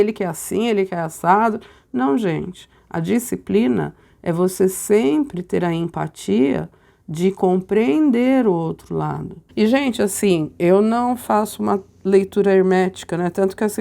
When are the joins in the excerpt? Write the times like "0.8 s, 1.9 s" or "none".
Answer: 9.4 s